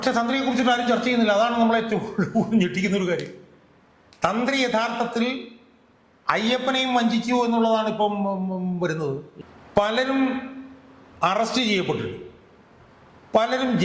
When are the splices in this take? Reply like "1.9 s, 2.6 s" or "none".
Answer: 9.3 s